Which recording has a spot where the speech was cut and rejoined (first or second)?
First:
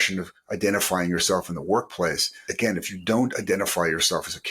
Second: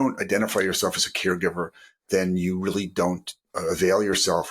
first